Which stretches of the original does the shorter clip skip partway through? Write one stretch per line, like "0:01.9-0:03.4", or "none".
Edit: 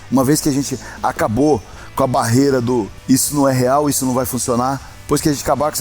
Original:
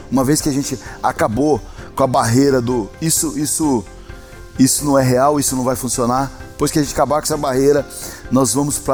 0:02.9-0:04.4